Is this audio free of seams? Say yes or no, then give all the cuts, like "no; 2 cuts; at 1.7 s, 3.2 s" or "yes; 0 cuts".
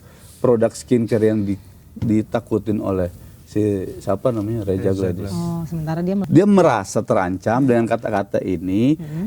no; 1 cut; at 6.2 s